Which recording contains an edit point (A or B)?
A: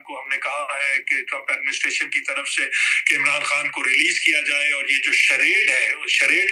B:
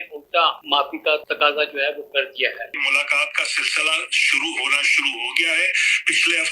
B